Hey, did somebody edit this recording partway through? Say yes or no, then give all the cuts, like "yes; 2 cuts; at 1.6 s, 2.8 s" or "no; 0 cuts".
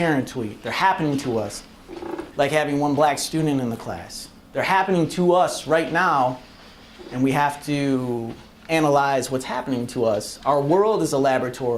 no; 0 cuts